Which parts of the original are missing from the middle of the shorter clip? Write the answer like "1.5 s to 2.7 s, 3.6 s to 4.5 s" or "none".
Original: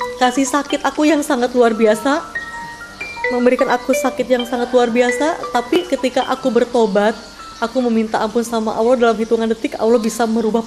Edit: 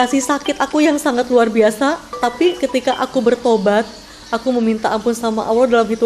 2.6 s to 5.7 s

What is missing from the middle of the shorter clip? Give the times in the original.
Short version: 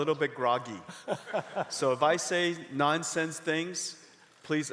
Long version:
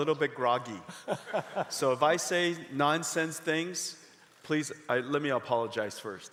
none

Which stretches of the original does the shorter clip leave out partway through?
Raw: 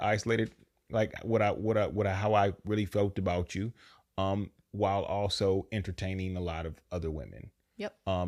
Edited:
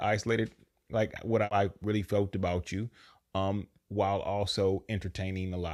1.5 s to 2.4 s

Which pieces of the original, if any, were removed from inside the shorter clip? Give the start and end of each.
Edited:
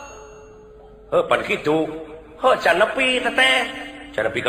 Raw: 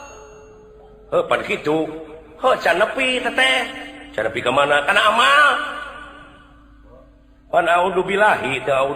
none

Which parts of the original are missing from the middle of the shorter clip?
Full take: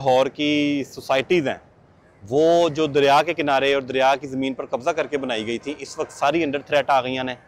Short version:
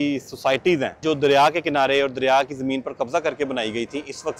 1.7 s to 2.7 s

